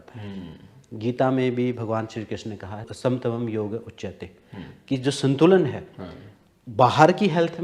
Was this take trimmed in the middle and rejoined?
yes; 1 cut; at 2.9 s

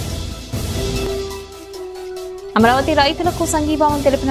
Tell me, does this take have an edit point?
yes; 2 cuts; at 1.0 s, 2.0 s

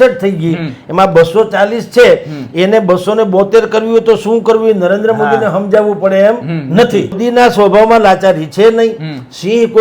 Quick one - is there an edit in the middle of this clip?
yes; 1 cut; at 7.2 s

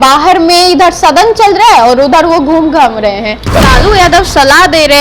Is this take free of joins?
no; 1 cut; at 3.5 s

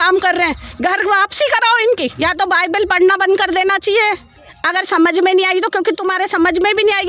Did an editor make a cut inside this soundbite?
yes; 1 cut; at 2.1 s

